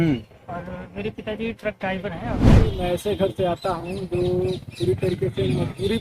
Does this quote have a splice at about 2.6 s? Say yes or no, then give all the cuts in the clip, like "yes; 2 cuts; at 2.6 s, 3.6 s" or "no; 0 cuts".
yes; 1 cut; at 2.6 s